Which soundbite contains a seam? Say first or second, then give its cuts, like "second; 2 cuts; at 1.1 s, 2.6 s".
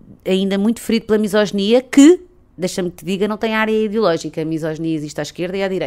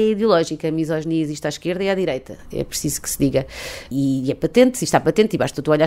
second; 1 cut; at 3.9 s